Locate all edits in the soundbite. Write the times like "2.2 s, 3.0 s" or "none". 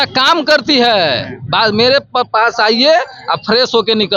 none